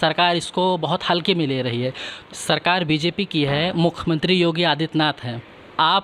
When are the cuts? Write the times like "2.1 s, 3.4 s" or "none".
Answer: 2.1 s

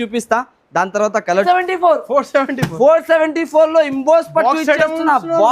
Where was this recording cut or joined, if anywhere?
1.4 s

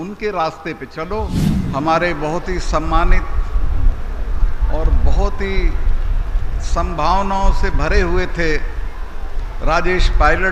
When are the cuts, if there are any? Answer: 1.4 s

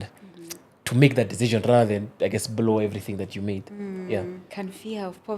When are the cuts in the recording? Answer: 4.4 s

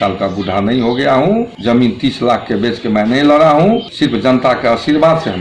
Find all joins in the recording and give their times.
1.5 s, 3.9 s

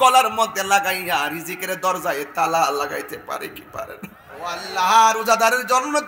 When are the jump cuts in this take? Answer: 4.6 s

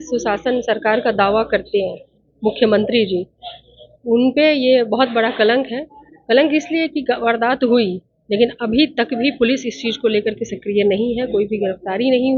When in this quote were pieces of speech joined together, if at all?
none

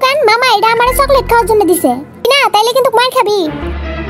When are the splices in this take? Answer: 2.3 s

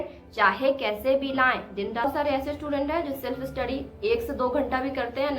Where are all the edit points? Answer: 2.0 s

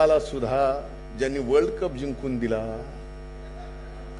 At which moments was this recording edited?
none

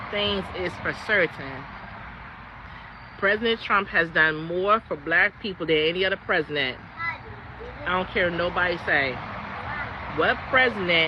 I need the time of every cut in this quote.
none

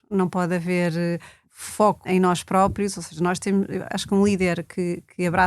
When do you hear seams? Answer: 1.7 s

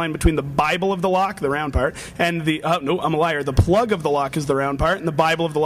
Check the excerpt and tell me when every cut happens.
2.4 s

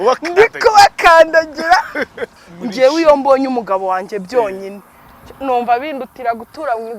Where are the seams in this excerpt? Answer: 2.4 s

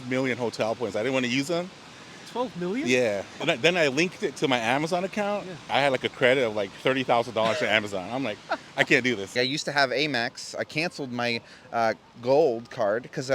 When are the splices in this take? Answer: 3.3 s, 5.7 s, 9.3 s

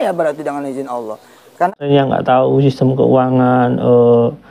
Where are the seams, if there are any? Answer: 1.9 s

